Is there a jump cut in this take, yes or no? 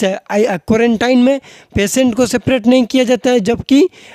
no